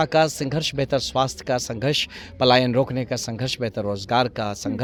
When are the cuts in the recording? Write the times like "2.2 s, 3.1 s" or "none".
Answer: none